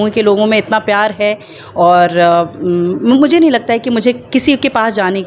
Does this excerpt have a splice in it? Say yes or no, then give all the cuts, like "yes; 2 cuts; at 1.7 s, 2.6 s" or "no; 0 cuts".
no; 0 cuts